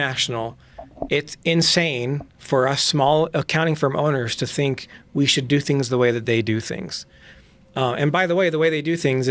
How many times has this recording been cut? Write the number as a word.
zero